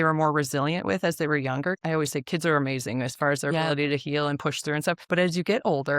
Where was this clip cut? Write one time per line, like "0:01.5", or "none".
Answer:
0:01.8
0:05.0